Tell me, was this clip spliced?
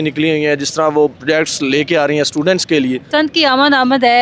yes; 2 cuts; at 1.1 s, 3.0 s

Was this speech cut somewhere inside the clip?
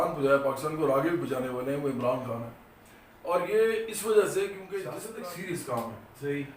yes; 1 cut; at 5.0 s

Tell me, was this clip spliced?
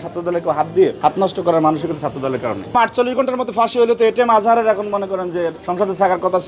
yes; 3 cuts; at 1.0 s, 2.7 s, 5.6 s

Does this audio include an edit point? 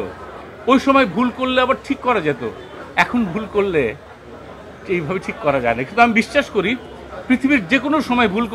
no; 0 cuts

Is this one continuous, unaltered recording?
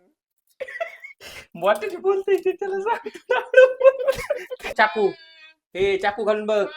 no; 1 cut; at 4.7 s

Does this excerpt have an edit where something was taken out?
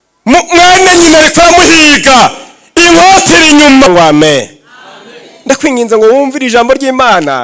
yes; 1 cut; at 3.9 s

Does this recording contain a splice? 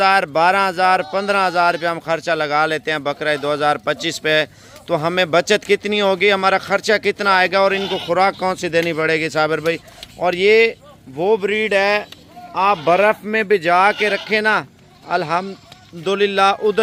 no; 0 cuts

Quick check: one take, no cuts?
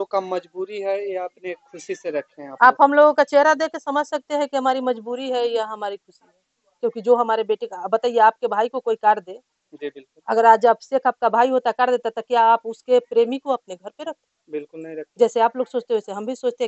yes; 0 cuts

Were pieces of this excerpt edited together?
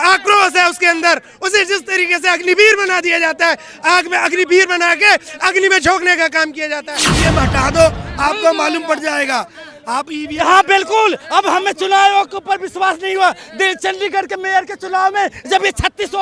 yes; 1 cut; at 7.0 s

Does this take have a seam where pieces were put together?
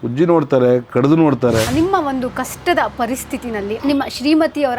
yes; 2 cuts; at 1.7 s, 3.8 s

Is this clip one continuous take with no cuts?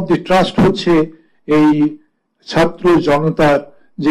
yes; 0 cuts

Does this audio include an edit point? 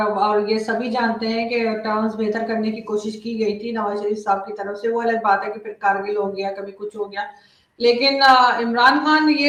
no; 0 cuts

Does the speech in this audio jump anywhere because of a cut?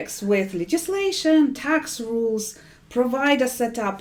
no; 0 cuts

